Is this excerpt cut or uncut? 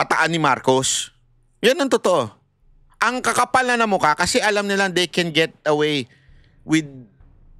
uncut